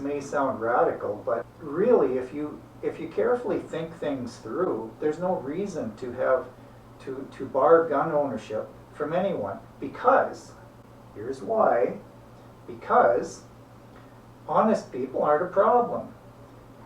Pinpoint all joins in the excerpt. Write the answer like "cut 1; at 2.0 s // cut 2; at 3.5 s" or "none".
cut 1; at 1.6 s